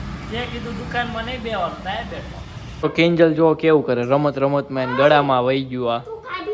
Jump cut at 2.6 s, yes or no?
yes